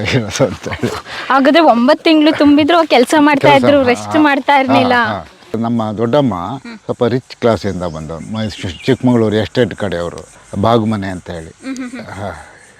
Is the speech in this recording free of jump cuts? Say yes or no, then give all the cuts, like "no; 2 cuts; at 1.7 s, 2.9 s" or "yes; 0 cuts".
no; 1 cut; at 5.6 s